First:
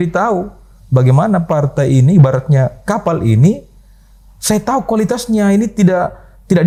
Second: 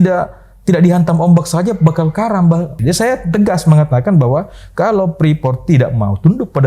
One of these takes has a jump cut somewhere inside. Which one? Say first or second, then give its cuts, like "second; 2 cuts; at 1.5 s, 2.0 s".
second; 1 cut; at 2.8 s